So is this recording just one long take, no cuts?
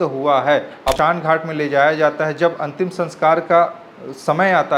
no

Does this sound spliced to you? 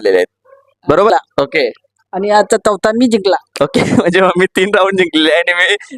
yes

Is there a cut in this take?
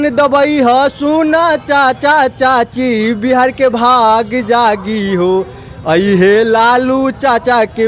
no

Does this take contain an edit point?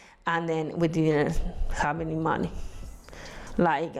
no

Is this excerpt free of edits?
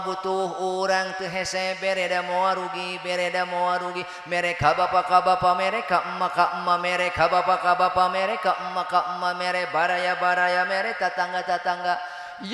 yes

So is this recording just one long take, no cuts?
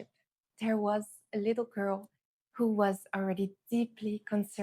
yes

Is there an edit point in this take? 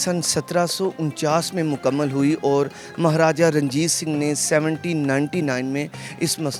no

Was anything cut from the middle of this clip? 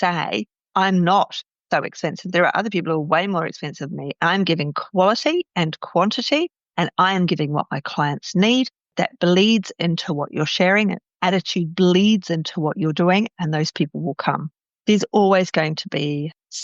no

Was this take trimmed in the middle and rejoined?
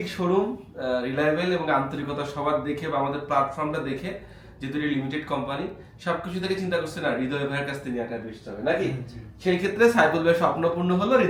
no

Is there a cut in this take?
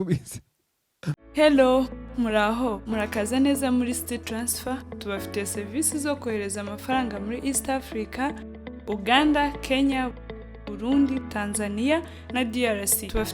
yes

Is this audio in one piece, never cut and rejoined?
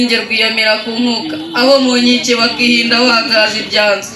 yes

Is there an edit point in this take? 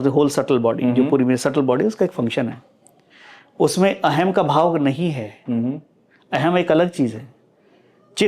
no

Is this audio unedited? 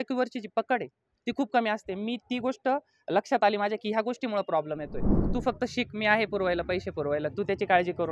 no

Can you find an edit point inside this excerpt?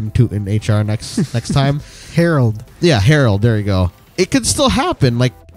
no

